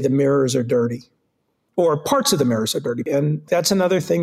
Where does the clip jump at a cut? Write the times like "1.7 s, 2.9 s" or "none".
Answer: 1.6 s, 3.2 s